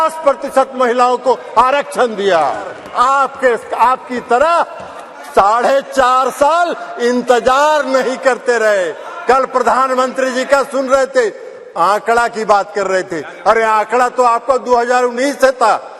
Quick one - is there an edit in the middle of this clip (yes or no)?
yes